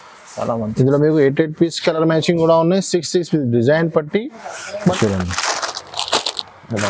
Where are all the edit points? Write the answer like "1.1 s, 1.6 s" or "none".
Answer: 4.9 s